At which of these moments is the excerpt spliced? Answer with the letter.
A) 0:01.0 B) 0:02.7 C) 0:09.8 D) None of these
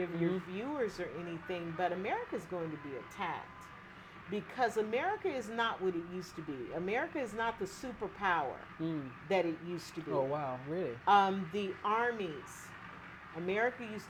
D